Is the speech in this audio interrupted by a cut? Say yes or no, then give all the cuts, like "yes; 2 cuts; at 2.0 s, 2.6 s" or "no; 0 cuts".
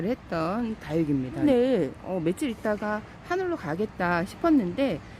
yes; 1 cut; at 1.4 s